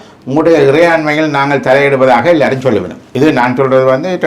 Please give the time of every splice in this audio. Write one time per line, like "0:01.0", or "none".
0:03.0